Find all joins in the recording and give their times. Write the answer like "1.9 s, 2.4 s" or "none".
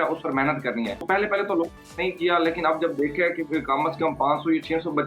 1.0 s, 1.8 s